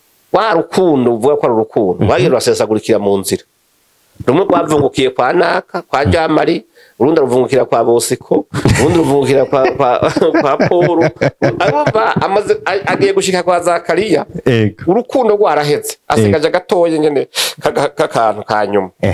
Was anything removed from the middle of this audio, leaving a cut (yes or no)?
no